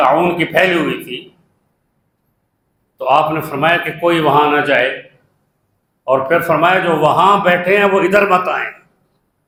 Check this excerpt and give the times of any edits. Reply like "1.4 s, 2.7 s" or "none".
none